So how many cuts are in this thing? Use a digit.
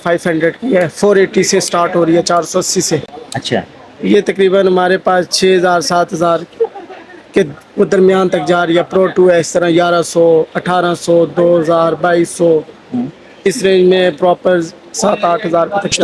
0